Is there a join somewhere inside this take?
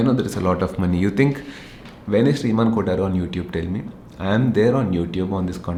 no; 0 cuts

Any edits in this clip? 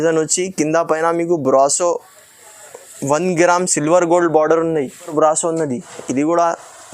yes; 1 cut; at 5.1 s

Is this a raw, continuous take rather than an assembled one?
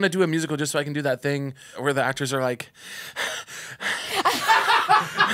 no; 1 cut; at 1.8 s

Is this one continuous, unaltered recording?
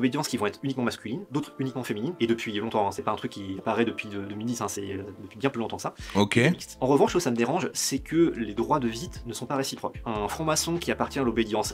yes; 0 cuts

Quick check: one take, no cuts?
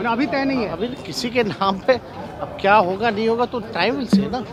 yes; 0 cuts

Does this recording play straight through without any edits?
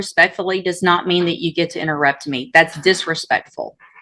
yes; 0 cuts

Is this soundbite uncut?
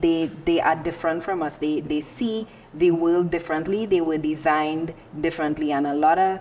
yes; 0 cuts

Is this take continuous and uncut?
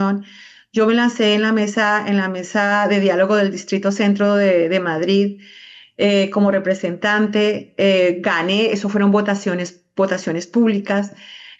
yes; 0 cuts

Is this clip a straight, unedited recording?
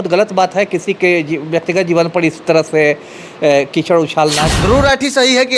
no; 1 cut; at 4.5 s

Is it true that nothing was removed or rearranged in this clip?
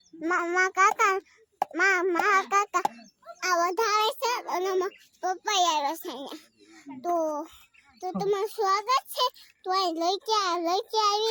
yes; 0 cuts

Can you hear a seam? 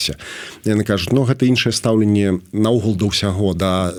no; 0 cuts

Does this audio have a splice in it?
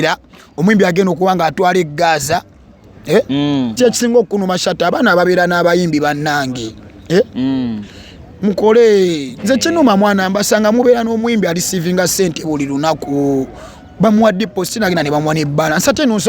yes; 1 cut; at 3.8 s

